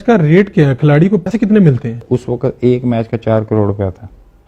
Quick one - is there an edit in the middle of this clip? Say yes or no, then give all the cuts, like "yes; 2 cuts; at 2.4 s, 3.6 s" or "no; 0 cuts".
yes; 1 cut; at 1.3 s